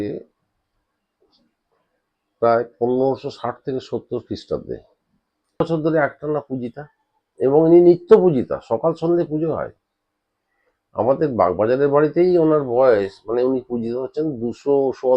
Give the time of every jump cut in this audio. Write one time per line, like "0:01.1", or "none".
0:05.6